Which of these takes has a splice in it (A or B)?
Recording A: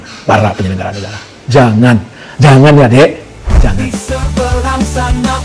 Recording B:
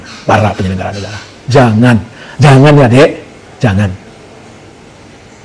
A